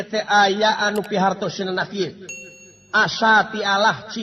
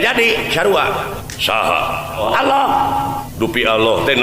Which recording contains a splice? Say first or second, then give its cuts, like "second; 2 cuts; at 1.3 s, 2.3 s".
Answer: second; 3 cuts; at 1.3 s, 2.2 s, 3.3 s